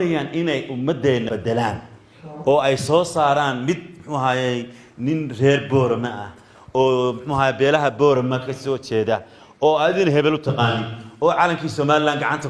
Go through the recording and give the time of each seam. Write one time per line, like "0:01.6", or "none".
0:01.3